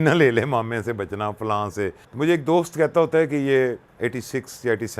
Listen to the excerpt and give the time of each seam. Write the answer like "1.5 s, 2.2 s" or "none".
2.0 s, 3.9 s